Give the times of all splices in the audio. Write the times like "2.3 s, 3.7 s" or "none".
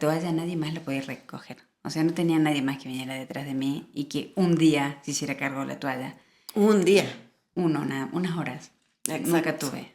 none